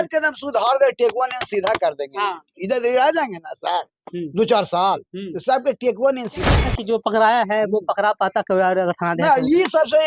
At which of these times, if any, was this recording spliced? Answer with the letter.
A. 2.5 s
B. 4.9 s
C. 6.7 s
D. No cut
C